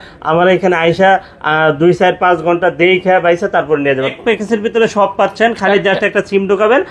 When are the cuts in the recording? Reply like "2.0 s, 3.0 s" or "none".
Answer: 4.1 s

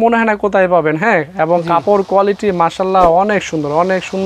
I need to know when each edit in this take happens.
none

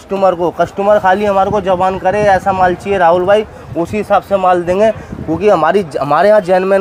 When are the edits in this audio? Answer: none

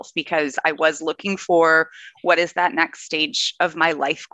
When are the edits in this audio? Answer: none

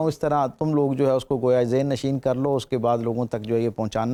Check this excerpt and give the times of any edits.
none

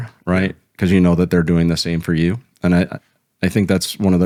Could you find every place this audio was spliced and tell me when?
none

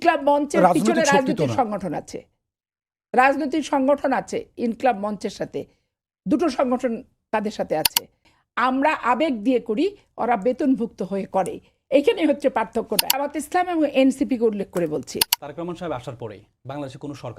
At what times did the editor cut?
8.3 s, 13.4 s, 15.2 s

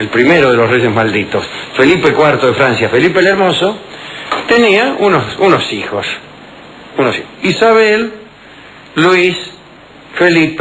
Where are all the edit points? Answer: 8.1 s

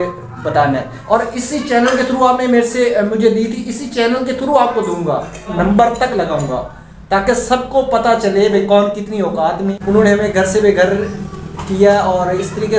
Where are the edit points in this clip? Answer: 0.9 s, 5.5 s, 9.7 s

